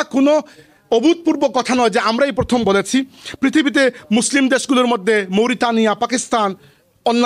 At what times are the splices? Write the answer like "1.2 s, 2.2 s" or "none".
none

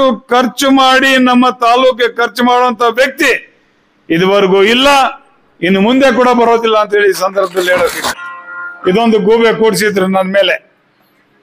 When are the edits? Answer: 8.0 s

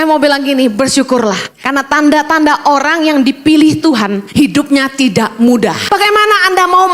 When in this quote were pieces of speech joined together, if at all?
1.5 s, 4.2 s, 5.8 s

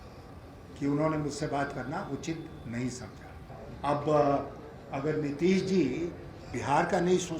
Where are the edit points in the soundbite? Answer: 3.5 s

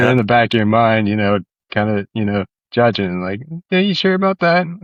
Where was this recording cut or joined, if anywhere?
none

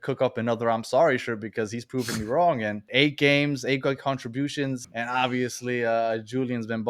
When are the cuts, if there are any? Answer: 2.9 s, 4.9 s

